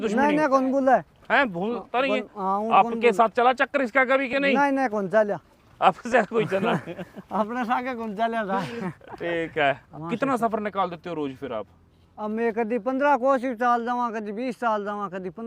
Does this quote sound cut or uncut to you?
cut